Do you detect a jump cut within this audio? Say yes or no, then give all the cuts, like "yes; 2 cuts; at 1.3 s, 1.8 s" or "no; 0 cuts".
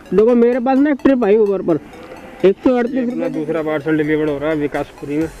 yes; 1 cut; at 3.2 s